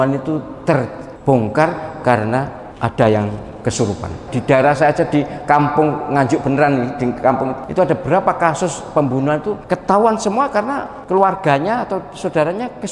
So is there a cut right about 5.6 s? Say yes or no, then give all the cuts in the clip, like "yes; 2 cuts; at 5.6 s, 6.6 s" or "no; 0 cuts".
no; 6 cuts; at 1.0 s, 2.6 s, 4.3 s, 7.6 s, 9.6 s, 10.9 s